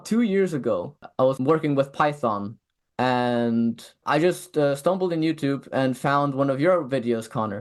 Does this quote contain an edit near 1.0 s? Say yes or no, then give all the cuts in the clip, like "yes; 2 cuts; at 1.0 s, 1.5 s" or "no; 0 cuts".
yes; 2 cuts; at 1.0 s, 4.0 s